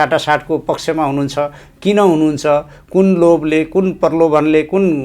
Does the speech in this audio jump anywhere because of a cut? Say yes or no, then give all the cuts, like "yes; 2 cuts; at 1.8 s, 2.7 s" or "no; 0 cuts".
no; 0 cuts